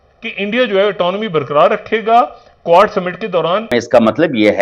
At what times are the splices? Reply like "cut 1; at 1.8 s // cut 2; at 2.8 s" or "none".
cut 1; at 3.7 s